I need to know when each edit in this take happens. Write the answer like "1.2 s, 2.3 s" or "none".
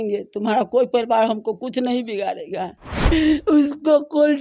3.1 s